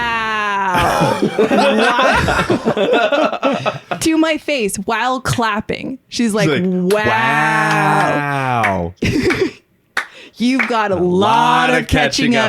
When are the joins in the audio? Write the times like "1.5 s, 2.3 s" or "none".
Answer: none